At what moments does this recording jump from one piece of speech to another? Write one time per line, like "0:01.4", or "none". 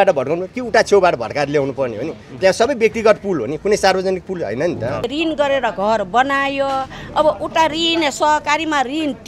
0:05.1